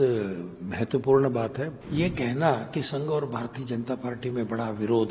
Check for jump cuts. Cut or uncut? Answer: cut